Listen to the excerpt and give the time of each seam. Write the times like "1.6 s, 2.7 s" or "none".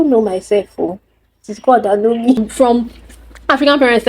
2.5 s